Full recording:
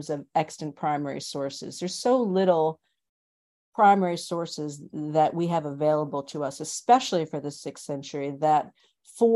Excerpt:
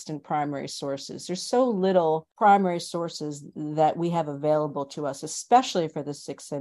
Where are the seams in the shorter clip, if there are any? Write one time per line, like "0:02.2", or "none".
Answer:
0:02.3